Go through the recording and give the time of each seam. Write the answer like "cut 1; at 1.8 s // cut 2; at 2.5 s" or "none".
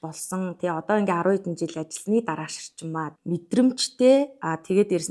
cut 1; at 3.1 s